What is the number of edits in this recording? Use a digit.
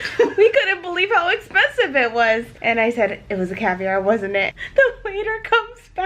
2